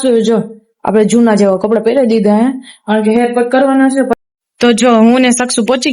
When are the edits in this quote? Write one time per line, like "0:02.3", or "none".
0:04.2